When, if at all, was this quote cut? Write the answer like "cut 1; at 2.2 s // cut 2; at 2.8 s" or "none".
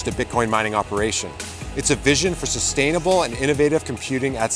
none